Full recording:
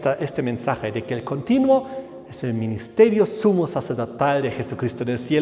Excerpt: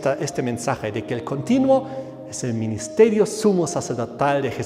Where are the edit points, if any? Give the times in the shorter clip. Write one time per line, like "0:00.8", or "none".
none